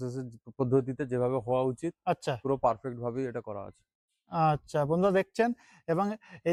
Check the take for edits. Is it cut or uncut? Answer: uncut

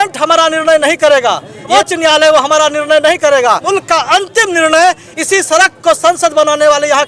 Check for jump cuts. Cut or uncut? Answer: cut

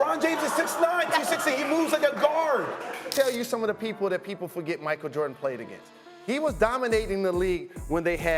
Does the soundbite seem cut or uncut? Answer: cut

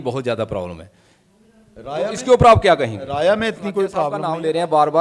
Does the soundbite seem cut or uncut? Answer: cut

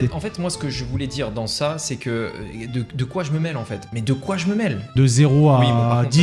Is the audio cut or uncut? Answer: cut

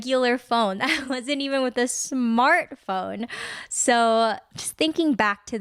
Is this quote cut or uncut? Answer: uncut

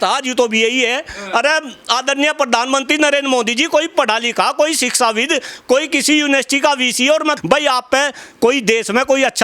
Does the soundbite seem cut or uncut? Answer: cut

